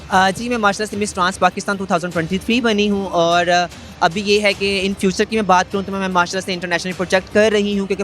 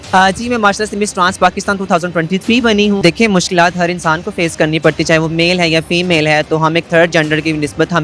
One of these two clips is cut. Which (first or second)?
second